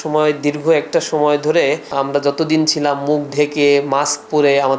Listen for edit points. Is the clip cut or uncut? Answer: cut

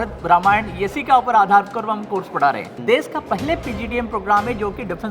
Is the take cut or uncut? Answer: cut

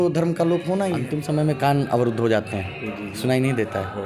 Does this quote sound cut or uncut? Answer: cut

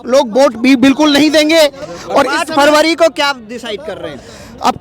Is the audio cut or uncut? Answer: uncut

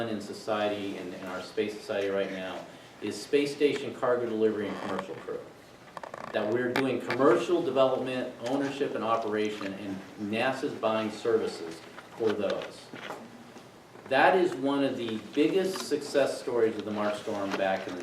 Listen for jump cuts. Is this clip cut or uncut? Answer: uncut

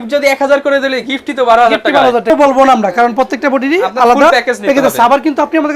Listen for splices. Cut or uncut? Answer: cut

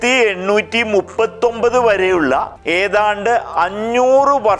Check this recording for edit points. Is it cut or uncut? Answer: cut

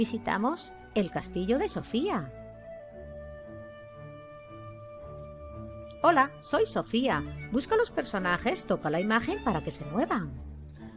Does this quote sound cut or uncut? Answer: cut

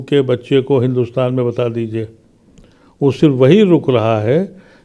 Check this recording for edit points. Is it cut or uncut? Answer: uncut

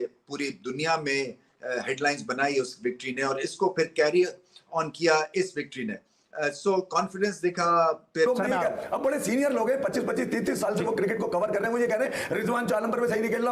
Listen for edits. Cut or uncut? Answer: cut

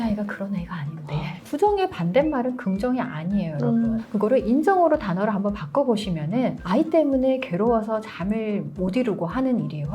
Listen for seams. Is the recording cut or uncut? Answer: cut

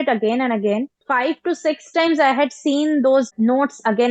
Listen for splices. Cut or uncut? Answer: cut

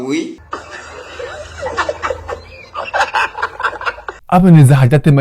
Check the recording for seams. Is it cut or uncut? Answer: cut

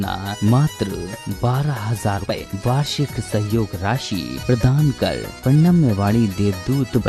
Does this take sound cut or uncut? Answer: cut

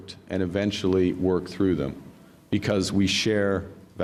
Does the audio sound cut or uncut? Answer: uncut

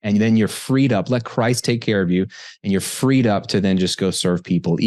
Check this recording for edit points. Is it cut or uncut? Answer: uncut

